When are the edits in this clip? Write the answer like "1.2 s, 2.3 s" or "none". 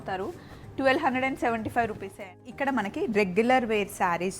2.5 s